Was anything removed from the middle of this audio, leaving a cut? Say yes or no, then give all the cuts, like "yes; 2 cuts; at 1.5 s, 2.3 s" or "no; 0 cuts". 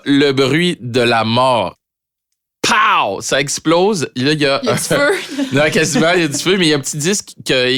no; 0 cuts